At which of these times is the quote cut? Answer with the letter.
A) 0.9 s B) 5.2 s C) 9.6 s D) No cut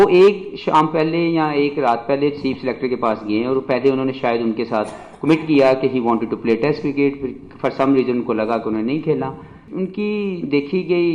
C